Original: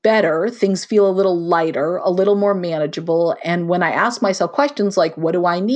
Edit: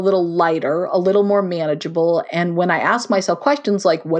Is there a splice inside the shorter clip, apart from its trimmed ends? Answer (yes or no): no